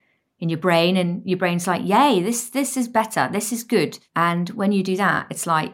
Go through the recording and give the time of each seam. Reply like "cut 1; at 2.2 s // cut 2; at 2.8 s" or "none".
cut 1; at 4.0 s

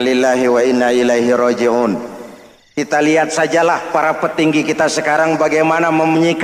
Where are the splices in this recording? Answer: none

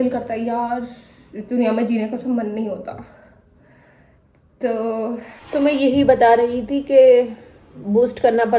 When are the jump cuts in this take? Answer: cut 1; at 5.3 s

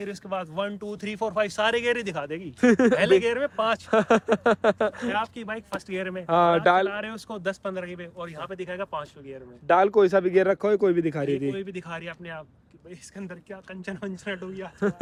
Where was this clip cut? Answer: none

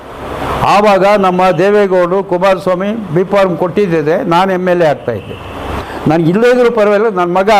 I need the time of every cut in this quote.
cut 1; at 5.8 s

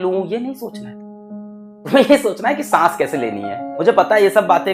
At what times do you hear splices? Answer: cut 1; at 3.7 s

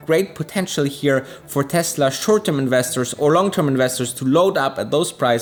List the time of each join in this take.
none

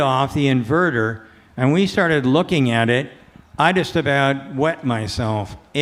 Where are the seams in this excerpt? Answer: none

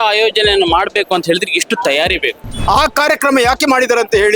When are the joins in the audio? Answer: cut 1; at 2.5 s

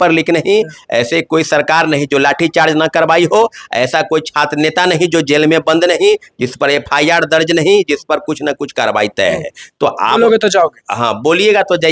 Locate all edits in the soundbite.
none

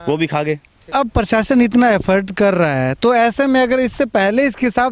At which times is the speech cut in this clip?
cut 1; at 0.9 s

